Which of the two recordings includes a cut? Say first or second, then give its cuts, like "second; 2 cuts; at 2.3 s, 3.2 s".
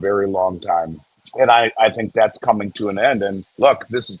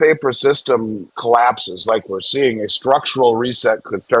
second; 1 cut; at 1.1 s